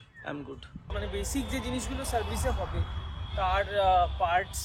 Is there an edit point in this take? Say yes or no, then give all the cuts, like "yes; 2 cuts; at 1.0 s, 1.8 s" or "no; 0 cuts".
yes; 1 cut; at 0.9 s